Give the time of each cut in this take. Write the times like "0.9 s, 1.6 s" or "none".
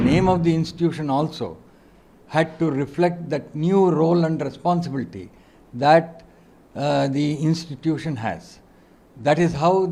none